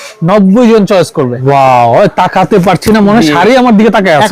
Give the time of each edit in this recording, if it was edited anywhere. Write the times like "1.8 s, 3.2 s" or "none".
1.4 s